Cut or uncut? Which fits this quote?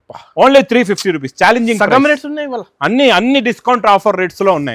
uncut